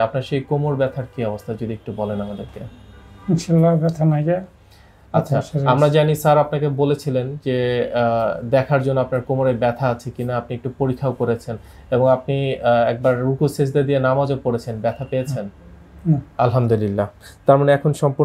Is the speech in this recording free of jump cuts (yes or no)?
yes